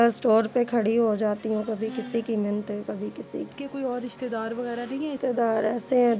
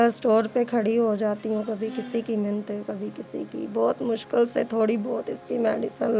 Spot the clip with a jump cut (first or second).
first